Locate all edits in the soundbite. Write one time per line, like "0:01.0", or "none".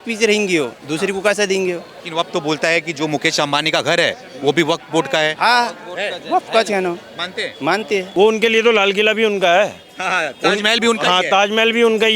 0:02.0
0:08.1